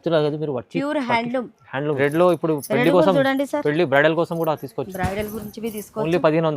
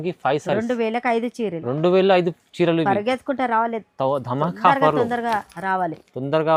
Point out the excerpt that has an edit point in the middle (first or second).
first